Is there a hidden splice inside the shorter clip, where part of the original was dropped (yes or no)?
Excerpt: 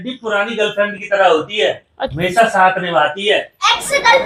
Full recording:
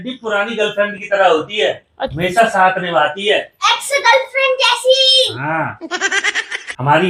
no